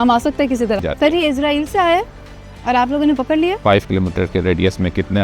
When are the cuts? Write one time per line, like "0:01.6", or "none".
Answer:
0:00.9
0:03.6